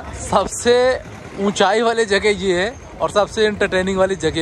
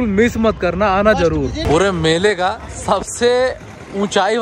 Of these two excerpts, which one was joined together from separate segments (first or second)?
second